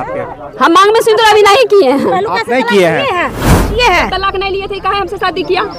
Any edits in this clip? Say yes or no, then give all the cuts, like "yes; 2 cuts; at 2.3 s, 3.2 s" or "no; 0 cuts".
yes; 1 cut; at 3.8 s